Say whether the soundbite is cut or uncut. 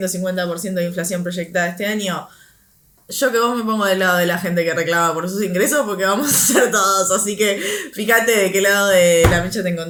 uncut